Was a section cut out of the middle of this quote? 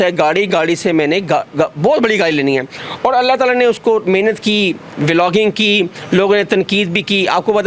no; 0 cuts

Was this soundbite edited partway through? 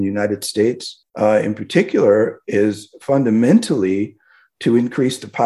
no; 0 cuts

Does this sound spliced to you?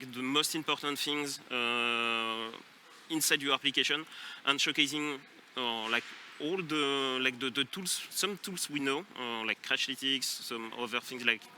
no; 0 cuts

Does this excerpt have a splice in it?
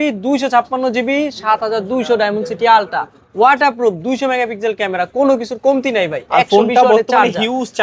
no; 0 cuts

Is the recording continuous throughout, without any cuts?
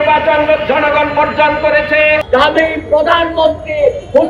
no; 1 cut; at 2.2 s

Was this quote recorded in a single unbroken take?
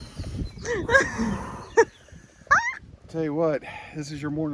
yes; 0 cuts

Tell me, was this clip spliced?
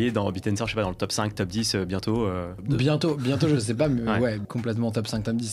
yes; 2 cuts; at 2.5 s, 4.4 s

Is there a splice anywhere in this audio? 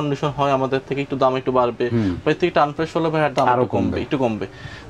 no; 0 cuts

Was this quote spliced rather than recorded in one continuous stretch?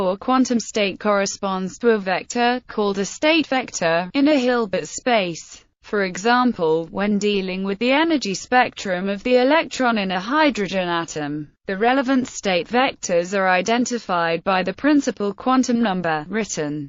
no; 0 cuts

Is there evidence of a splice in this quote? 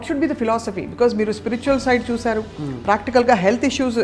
no; 0 cuts

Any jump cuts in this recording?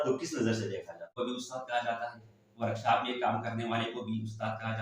yes; 1 cut; at 1.2 s

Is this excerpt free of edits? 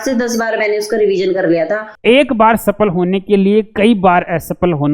no; 1 cut; at 1.9 s

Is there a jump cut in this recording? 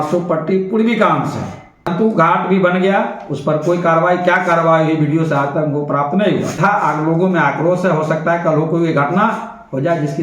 yes; 2 cuts; at 1.9 s, 6.6 s

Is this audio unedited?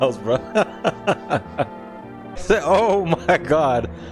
no; 1 cut; at 2.1 s

